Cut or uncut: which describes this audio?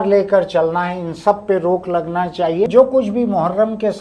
cut